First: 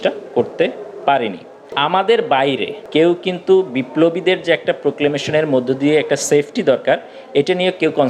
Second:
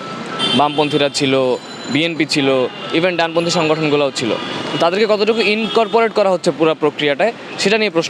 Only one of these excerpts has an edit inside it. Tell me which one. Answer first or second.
first